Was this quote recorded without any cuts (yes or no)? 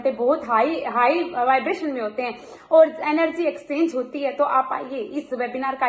yes